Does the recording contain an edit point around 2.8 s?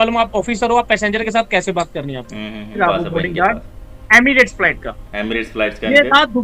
yes; 1 cut; at 2.8 s

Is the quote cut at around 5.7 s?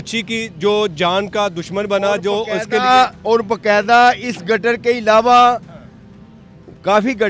no; 0 cuts

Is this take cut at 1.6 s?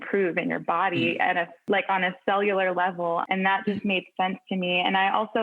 yes; 2 cuts; at 1.6 s, 3.3 s

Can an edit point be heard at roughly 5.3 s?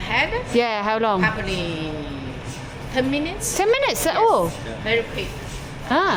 no; 0 cuts

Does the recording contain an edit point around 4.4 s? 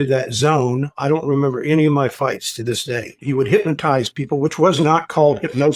no; 2 cuts; at 1.0 s, 3.2 s

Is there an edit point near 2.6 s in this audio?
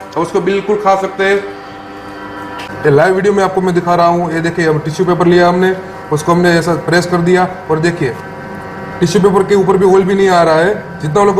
yes; 1 cut; at 2.6 s

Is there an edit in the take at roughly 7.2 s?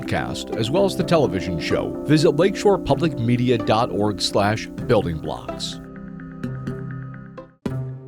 yes; 1 cut; at 7.2 s

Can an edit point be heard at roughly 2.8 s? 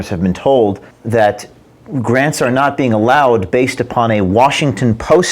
no; 1 cut; at 0.9 s

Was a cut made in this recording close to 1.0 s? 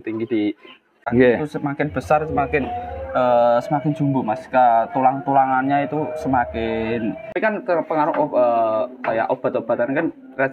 yes; 2 cuts; at 1.0 s, 7.4 s

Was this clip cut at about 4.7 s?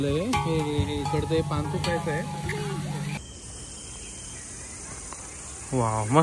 no; 1 cut; at 3.2 s

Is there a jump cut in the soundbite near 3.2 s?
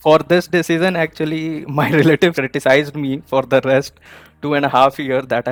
no; 0 cuts

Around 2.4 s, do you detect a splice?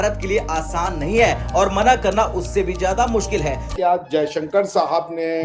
no; 1 cut; at 3.7 s

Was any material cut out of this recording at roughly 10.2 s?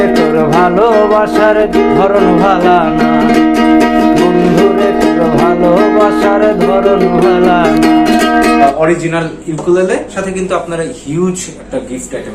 yes; 2 cuts; at 8.6 s, 10.2 s

